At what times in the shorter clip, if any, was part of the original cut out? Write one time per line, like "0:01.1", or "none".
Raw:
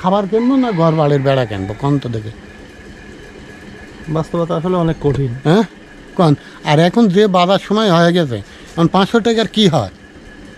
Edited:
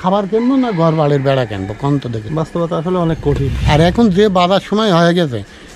0:02.2
0:03.5